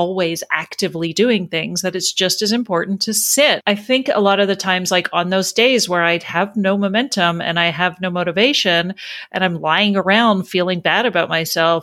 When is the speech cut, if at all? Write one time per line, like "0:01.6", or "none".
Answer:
0:03.6

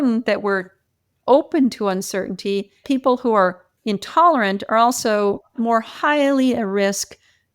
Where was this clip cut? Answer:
0:02.8
0:03.7

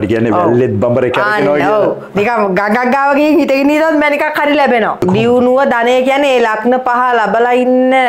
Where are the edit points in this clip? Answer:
none

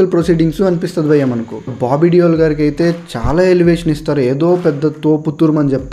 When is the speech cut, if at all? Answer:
0:01.6

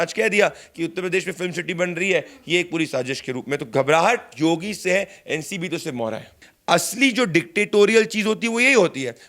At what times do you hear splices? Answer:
0:06.5

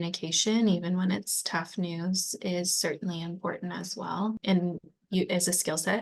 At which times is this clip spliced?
0:04.4

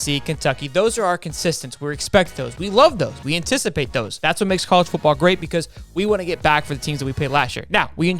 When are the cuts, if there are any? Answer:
0:04.1

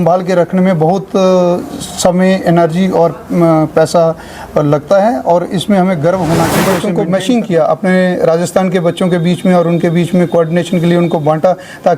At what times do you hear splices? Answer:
0:06.9

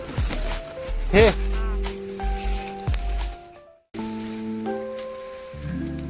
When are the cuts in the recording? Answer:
0:03.9

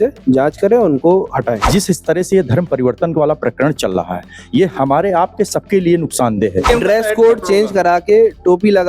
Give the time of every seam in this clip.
0:01.7
0:06.7

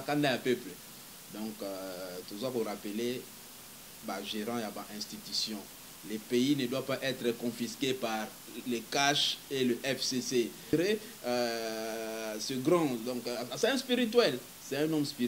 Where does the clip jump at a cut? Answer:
0:10.7

